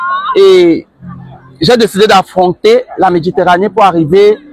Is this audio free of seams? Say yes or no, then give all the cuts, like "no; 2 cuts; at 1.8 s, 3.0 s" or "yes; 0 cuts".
yes; 0 cuts